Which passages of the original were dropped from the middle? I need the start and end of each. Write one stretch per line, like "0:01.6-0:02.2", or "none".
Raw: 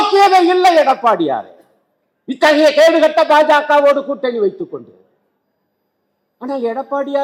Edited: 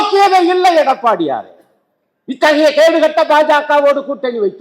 none